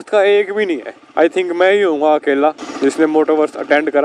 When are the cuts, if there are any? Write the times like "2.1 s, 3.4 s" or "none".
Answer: 2.7 s